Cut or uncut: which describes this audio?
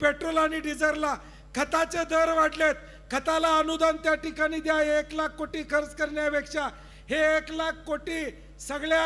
uncut